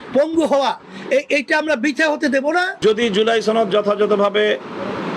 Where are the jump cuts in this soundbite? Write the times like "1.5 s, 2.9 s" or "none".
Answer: 2.8 s